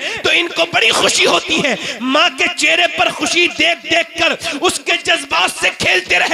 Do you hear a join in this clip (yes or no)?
no